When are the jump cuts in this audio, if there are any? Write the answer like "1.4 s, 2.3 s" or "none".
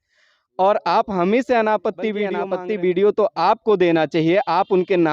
2.4 s